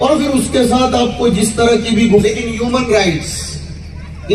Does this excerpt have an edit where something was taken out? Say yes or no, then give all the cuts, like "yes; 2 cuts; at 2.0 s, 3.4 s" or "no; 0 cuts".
yes; 1 cut; at 2.2 s